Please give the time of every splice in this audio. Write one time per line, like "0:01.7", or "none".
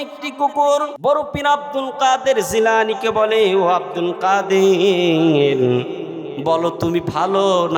0:00.9

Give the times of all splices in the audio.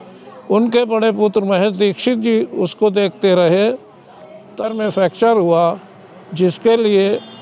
0:04.6

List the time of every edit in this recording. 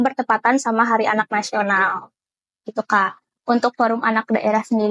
none

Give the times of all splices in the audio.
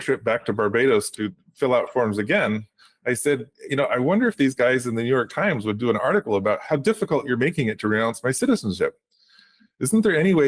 0:06.6

